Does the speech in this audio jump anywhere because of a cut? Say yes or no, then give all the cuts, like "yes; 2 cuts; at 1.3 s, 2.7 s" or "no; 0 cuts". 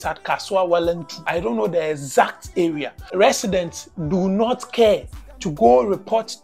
yes; 2 cuts; at 1.1 s, 3.0 s